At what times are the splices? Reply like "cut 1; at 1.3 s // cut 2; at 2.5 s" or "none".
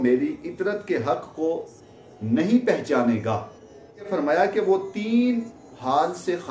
cut 1; at 4.1 s